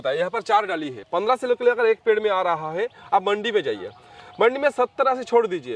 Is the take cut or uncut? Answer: cut